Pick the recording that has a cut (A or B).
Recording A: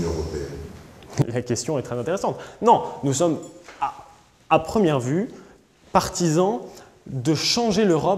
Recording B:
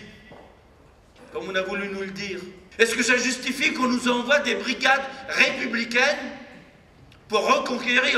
B